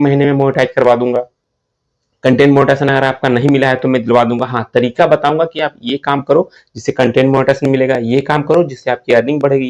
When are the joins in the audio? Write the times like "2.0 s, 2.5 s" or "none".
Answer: none